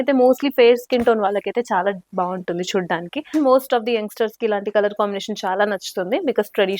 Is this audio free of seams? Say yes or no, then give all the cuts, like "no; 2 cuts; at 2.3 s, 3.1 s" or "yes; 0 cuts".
no; 1 cut; at 3.2 s